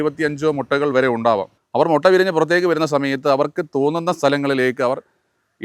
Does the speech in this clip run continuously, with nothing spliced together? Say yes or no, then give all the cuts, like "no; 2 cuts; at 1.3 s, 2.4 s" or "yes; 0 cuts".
no; 1 cut; at 1.6 s